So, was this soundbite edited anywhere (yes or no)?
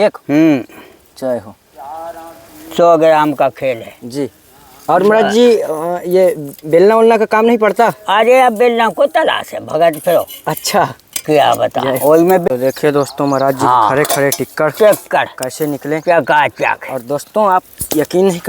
yes